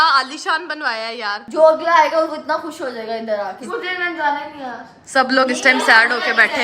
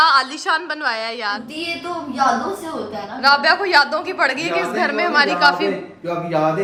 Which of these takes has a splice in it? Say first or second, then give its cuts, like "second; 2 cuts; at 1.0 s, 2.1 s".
first; 2 cuts; at 1.4 s, 3.6 s